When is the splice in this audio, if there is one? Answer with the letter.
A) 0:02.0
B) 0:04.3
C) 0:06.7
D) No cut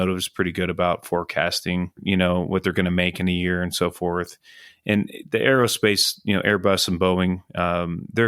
A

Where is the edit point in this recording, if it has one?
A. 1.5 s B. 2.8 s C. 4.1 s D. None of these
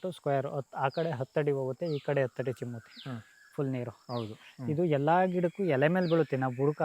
D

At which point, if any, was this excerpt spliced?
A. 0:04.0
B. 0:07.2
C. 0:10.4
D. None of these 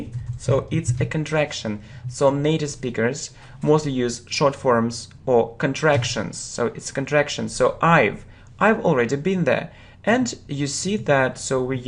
D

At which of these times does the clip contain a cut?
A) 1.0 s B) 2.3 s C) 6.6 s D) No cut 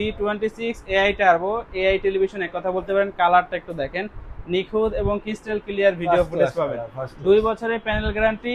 D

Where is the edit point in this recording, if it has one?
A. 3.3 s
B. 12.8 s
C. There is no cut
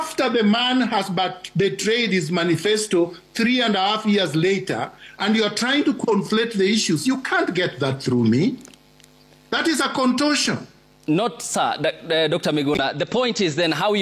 C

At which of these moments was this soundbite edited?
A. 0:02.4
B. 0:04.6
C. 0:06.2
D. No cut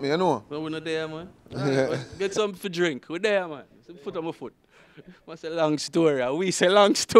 D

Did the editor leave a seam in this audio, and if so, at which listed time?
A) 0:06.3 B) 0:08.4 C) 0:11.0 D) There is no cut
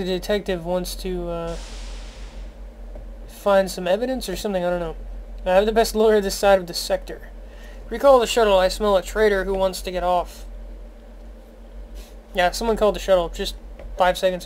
A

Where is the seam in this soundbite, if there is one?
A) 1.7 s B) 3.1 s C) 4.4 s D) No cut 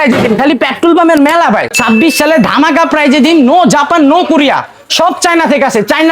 A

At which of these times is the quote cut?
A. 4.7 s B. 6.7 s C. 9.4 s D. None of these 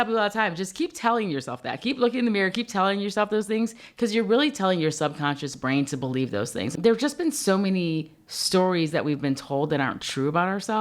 B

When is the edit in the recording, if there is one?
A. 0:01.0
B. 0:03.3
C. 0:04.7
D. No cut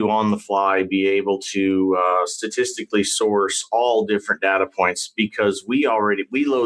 D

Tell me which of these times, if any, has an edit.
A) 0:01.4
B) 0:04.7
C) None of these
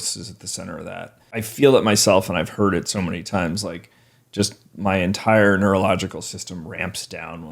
A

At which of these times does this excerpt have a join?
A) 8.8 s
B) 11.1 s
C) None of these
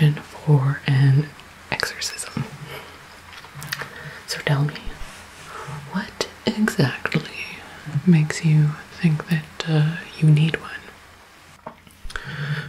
B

